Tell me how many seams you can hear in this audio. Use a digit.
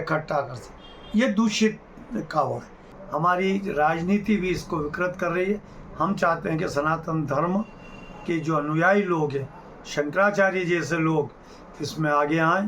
1